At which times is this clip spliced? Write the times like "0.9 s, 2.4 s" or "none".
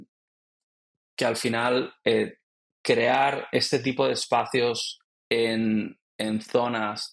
none